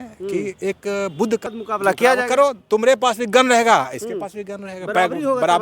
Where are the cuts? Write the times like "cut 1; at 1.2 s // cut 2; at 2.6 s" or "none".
cut 1; at 1.4 s